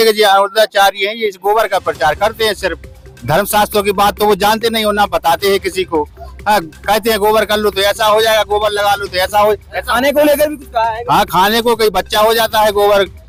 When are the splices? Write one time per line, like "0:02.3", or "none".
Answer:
none